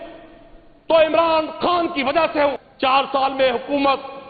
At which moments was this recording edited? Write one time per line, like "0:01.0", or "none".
0:02.6